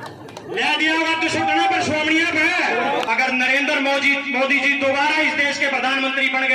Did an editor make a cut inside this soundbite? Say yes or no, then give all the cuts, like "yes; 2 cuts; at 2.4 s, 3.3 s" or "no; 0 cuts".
yes; 1 cut; at 3.1 s